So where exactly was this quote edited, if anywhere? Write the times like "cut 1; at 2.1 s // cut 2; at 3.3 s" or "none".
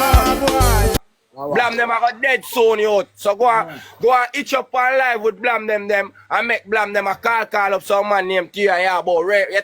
cut 1; at 1.0 s